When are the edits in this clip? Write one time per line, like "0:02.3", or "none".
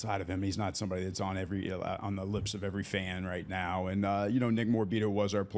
none